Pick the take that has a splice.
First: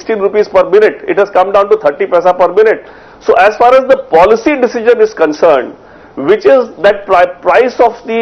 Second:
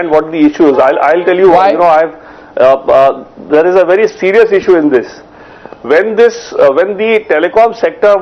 second; 1 cut; at 2.9 s

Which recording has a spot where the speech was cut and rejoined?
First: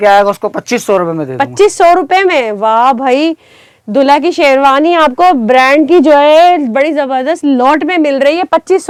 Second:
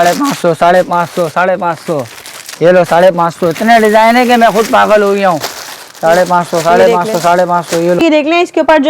second; 1 cut; at 8.0 s

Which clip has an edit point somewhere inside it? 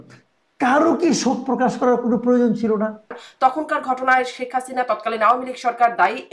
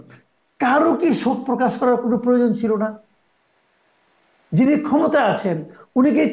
first; 1 cut; at 3.2 s

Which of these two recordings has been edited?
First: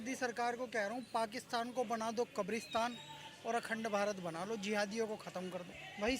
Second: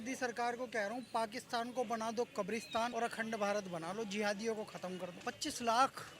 second; 2 cuts; at 2.9 s, 5.1 s

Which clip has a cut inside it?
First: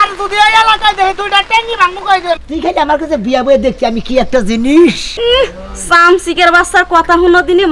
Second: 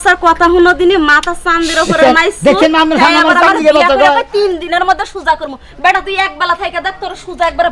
first; 2 cuts; at 2.4 s, 5.1 s

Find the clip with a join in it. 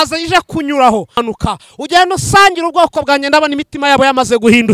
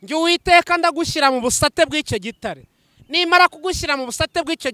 first; 1 cut; at 1.2 s

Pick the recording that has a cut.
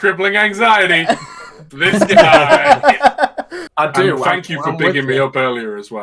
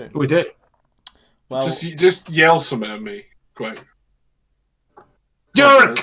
first; 1 cut; at 3.6 s

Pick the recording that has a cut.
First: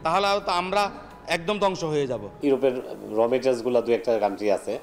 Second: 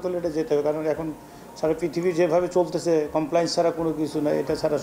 first; 1 cut; at 2.2 s

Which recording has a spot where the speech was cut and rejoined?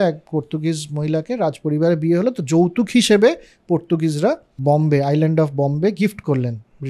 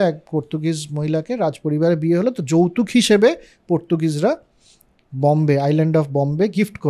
first; 1 cut; at 4.5 s

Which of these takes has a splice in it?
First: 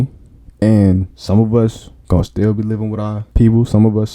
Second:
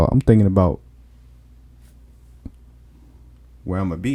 first; 3 cuts; at 1.1 s, 1.9 s, 3.2 s

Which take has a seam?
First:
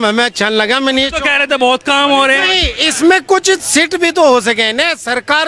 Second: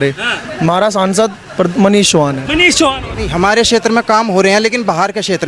second; 1 cut; at 3.2 s

